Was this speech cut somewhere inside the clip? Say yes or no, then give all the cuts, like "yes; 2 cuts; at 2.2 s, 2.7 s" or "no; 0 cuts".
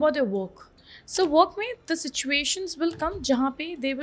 no; 0 cuts